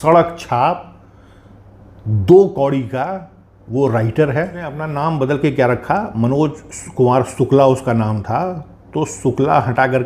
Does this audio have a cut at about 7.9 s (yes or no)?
no